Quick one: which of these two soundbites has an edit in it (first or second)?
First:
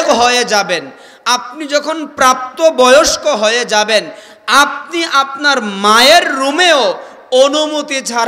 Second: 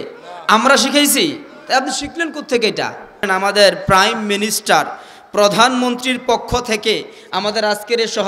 second